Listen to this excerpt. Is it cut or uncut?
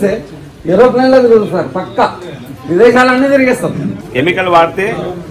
cut